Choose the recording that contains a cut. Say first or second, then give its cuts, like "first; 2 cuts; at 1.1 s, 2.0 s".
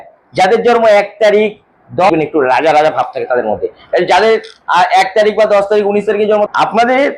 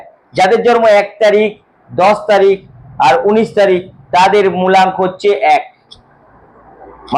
first; 2 cuts; at 2.1 s, 6.5 s